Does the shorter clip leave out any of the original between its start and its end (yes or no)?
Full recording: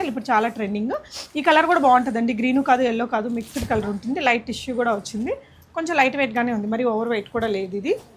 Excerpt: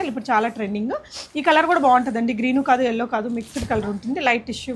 no